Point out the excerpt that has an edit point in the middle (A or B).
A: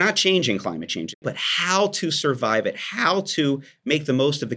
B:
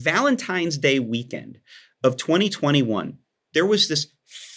A